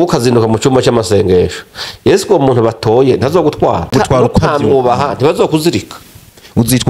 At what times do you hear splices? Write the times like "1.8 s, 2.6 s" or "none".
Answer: 3.9 s